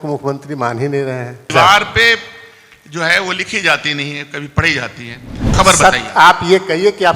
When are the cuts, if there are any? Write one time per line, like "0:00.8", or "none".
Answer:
0:01.5
0:05.5

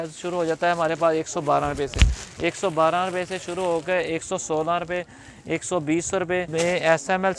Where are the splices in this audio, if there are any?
0:06.5

